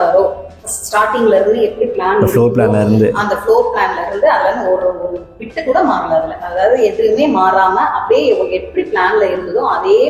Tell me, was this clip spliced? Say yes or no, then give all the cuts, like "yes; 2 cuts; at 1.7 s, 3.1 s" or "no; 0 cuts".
no; 0 cuts